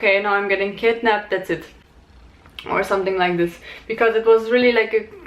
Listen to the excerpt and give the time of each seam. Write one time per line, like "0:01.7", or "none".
none